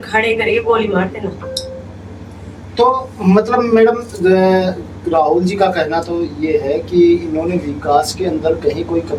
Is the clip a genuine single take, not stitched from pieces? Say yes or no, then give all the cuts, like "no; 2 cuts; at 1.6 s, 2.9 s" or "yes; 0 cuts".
yes; 0 cuts